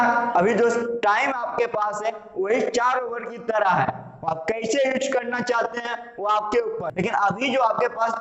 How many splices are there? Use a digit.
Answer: 1